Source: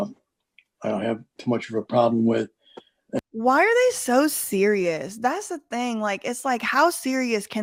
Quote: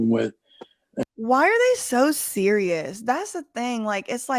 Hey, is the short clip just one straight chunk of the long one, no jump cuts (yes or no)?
yes